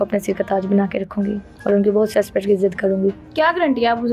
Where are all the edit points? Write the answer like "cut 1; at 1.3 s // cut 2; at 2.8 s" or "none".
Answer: none